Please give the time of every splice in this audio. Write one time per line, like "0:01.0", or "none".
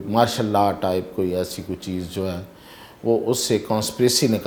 none